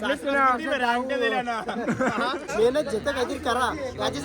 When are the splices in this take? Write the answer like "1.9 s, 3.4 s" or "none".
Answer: 2.5 s